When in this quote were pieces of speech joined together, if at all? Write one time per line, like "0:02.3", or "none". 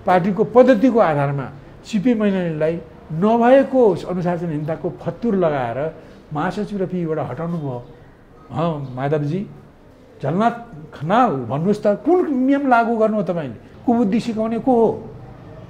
0:13.7